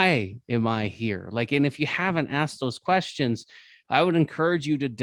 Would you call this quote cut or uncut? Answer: uncut